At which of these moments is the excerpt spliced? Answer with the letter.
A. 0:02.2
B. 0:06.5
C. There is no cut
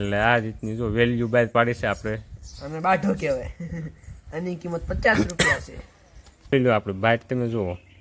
B